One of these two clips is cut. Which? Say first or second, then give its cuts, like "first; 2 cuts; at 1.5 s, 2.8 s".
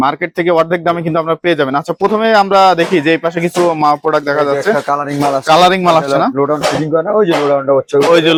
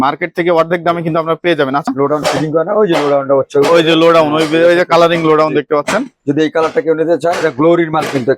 second; 1 cut; at 1.9 s